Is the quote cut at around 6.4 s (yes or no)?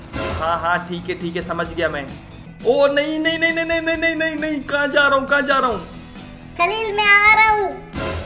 no